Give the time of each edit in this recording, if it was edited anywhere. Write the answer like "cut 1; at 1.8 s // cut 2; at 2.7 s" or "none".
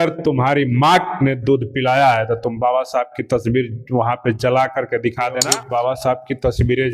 cut 1; at 5.6 s